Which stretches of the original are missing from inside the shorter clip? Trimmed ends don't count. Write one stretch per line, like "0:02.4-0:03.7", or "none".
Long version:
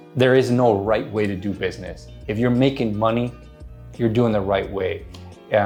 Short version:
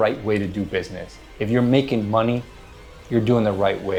none